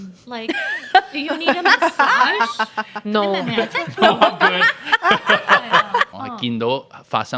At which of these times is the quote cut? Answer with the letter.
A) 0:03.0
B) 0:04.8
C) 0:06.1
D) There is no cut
C